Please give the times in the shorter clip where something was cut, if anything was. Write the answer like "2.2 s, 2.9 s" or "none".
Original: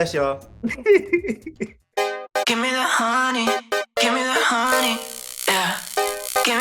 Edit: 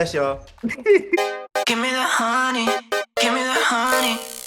1.2 s